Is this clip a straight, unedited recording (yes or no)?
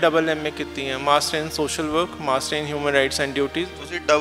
yes